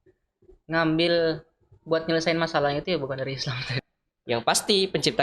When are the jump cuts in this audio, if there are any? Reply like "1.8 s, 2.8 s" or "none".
3.7 s